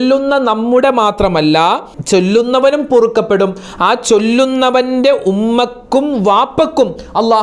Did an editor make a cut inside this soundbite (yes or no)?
yes